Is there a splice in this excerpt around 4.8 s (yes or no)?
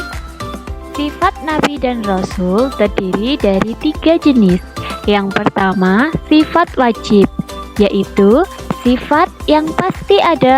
no